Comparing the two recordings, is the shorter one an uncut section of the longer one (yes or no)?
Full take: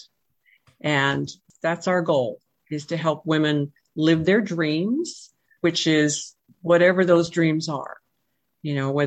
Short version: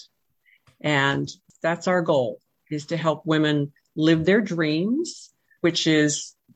yes